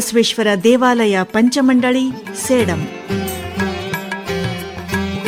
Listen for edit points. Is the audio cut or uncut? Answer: uncut